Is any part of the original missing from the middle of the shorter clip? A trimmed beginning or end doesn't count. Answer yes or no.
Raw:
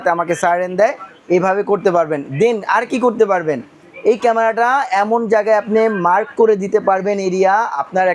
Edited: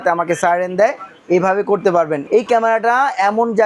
yes